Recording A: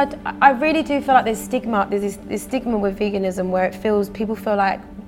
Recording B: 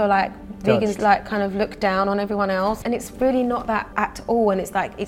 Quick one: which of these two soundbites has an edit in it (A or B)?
B